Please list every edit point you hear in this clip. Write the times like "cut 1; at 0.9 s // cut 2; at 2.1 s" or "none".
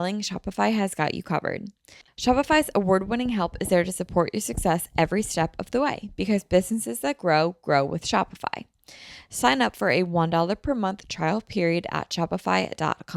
cut 1; at 2.0 s